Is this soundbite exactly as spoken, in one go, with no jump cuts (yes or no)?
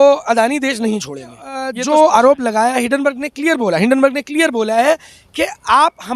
no